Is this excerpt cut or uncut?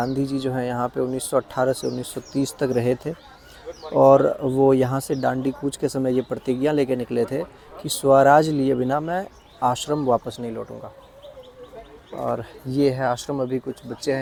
uncut